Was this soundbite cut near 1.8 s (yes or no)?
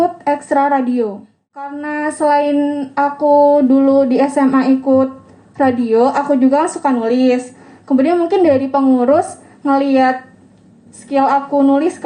yes